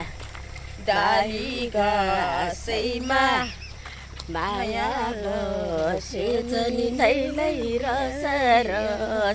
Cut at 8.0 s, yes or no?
no